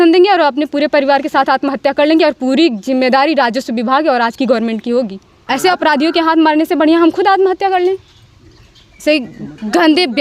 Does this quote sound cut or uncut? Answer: cut